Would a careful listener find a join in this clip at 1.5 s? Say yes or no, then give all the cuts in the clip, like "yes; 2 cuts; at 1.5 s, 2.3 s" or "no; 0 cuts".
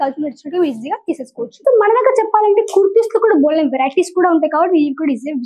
yes; 1 cut; at 1.5 s